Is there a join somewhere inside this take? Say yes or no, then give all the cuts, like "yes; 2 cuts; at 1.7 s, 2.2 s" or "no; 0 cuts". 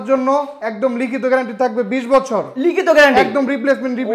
no; 0 cuts